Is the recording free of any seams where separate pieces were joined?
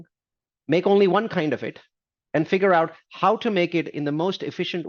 yes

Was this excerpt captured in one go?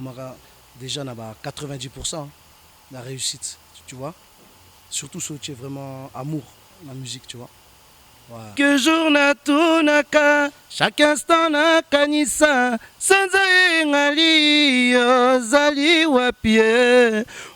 no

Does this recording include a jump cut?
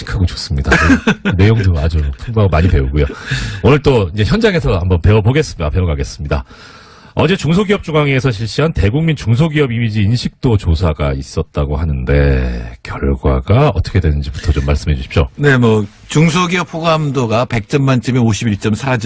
yes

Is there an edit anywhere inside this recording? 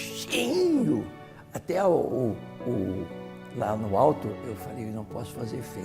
yes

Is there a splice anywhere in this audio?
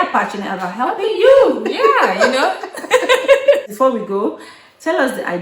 yes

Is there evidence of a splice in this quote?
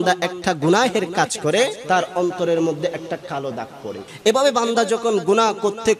yes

